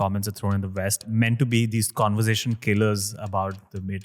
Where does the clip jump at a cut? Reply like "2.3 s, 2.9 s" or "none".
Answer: 1.0 s